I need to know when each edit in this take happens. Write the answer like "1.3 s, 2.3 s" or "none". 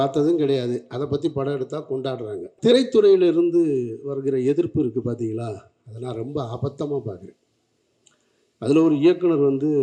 2.6 s